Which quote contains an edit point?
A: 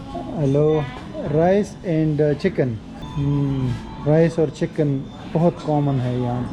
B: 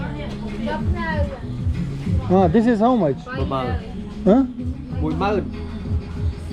A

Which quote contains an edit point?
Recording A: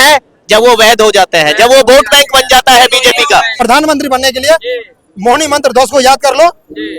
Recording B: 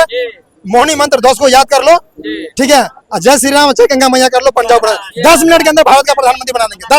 A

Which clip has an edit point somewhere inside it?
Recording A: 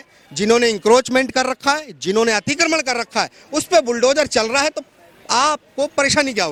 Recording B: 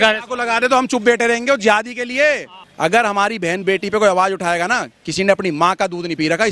B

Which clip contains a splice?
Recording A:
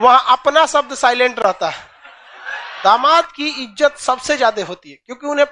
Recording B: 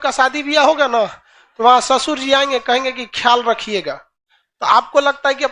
A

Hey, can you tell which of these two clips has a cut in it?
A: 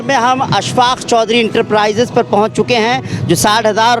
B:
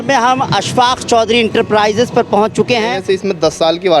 B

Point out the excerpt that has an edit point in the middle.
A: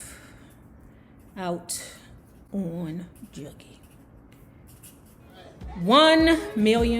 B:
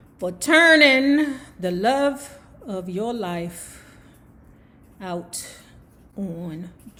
A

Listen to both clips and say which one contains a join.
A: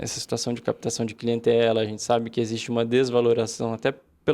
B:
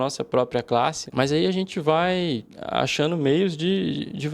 B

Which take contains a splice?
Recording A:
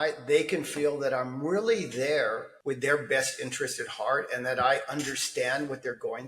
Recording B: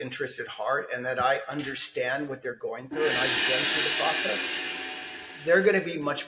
A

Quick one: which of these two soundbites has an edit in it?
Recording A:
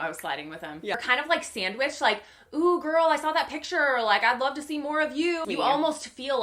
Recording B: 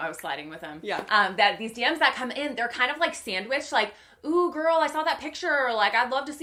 A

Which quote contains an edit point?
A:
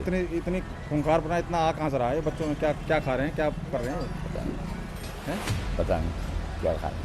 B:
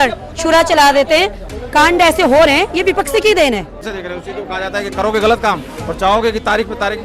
B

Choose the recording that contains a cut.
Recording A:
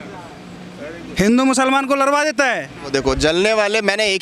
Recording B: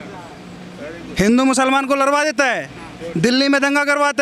A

